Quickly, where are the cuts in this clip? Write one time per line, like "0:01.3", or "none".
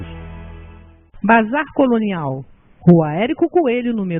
0:01.2